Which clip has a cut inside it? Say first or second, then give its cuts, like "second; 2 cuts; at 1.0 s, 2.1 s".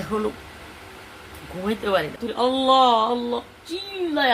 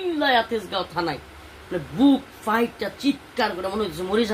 first; 1 cut; at 2.2 s